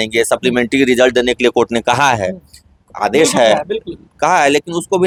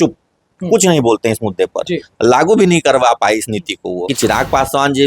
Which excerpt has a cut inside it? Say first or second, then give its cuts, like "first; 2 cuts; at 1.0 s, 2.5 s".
second; 1 cut; at 4.1 s